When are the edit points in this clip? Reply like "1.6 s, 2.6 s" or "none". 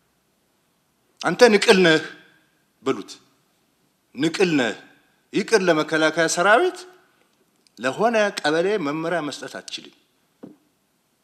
none